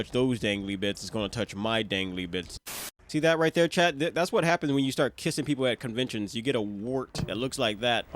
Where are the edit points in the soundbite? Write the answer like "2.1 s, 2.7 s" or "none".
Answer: 2.8 s, 7.2 s